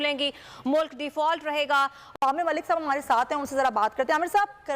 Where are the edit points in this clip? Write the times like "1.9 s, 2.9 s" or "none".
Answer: 2.0 s